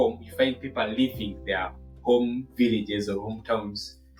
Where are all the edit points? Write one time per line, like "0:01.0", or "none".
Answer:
none